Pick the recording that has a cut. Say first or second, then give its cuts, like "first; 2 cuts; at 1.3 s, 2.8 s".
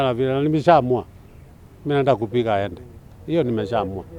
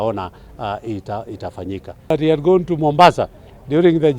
second; 1 cut; at 2.1 s